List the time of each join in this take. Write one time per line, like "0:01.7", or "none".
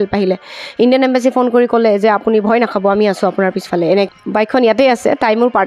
0:04.1